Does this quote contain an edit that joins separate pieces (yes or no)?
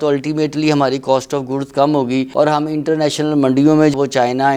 no